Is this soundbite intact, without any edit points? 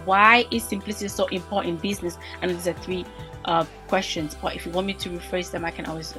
yes; 0 cuts

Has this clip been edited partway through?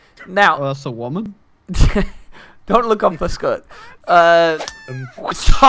no; 0 cuts

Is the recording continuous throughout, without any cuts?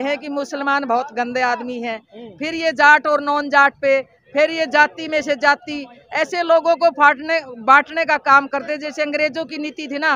yes; 0 cuts

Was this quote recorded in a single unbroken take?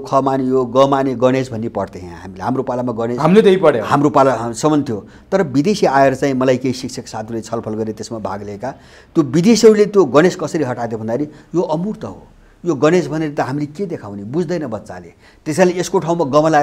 yes; 0 cuts

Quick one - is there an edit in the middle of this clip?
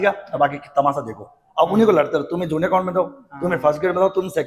no; 0 cuts

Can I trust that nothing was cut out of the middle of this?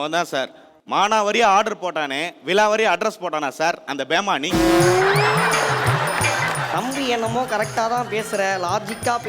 yes; 0 cuts

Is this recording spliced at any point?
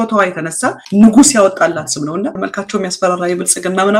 yes; 1 cut; at 2.4 s

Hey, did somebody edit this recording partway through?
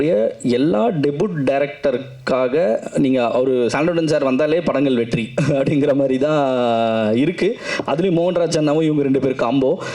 no; 0 cuts

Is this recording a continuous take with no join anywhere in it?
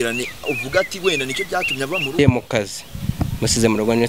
no; 1 cut; at 2.2 s

